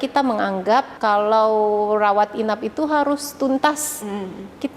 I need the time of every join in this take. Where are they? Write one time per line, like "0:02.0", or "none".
0:00.9